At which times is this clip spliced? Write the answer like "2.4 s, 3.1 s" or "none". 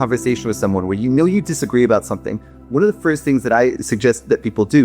3.8 s